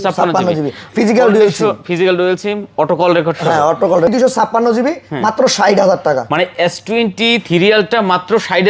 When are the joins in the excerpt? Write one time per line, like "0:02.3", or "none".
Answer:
0:04.1